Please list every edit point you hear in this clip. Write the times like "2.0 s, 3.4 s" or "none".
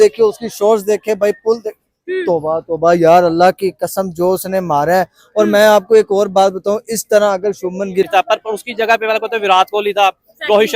8.1 s